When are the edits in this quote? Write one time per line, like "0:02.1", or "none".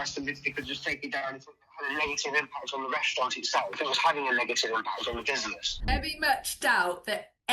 0:05.7